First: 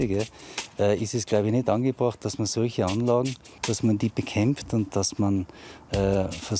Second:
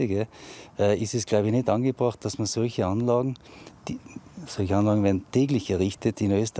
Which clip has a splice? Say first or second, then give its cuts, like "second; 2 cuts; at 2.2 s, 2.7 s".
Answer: first; 1 cut; at 3.5 s